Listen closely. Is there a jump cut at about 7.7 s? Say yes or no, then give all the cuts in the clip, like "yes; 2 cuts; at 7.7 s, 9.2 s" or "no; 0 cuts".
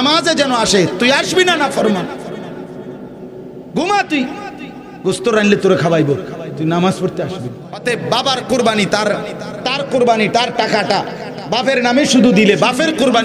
yes; 1 cut; at 7.7 s